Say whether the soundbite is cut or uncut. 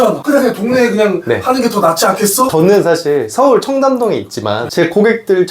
cut